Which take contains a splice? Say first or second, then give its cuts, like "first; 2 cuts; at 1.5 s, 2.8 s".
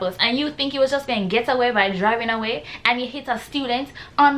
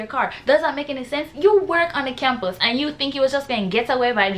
second; 1 cut; at 1.3 s